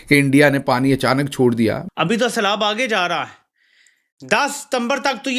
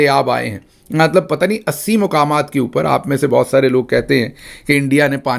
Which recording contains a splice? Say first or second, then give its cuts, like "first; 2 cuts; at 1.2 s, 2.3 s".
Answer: first; 1 cut; at 1.8 s